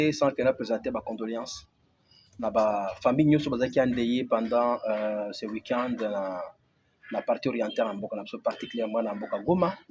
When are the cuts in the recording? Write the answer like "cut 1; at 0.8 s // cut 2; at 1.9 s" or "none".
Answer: none